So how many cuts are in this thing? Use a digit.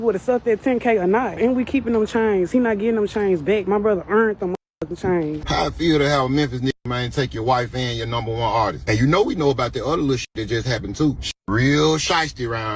4